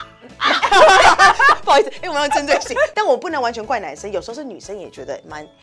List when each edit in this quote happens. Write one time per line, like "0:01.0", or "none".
0:02.9